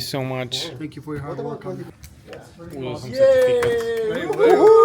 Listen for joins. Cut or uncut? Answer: cut